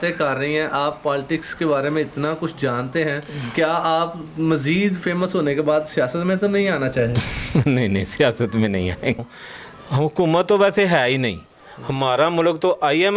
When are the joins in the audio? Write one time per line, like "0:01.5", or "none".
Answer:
0:09.2